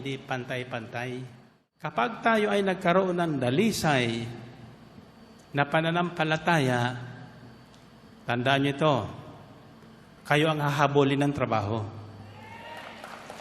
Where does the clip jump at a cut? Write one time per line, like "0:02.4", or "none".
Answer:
0:01.9